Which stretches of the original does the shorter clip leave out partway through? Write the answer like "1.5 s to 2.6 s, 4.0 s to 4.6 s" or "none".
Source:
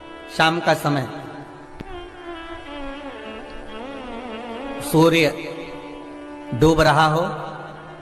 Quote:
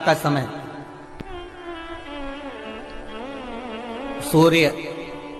none